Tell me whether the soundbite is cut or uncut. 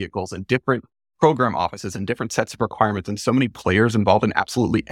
uncut